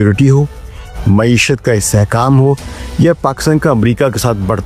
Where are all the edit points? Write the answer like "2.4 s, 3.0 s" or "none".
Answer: none